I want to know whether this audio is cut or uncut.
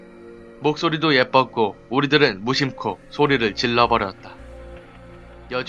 cut